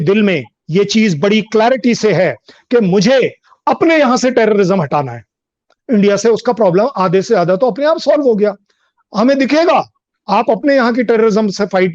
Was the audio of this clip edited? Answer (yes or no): no